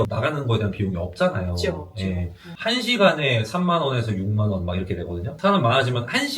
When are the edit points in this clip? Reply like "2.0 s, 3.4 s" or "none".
2.6 s

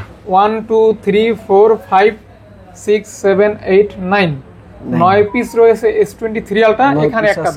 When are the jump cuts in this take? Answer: none

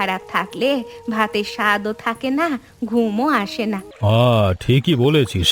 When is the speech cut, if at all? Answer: 3.9 s

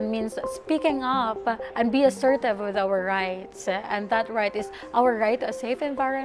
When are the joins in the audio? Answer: none

